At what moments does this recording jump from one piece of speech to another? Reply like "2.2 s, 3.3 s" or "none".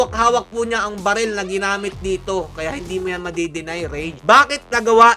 2.6 s, 4.1 s